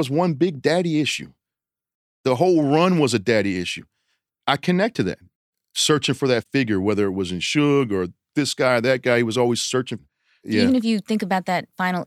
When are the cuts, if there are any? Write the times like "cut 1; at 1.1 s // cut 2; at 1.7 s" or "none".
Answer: cut 1; at 10.5 s